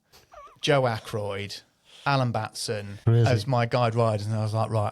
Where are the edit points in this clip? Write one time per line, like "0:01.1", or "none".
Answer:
0:02.9